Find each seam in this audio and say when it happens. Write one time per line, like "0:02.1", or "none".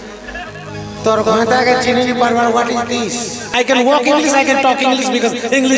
0:03.4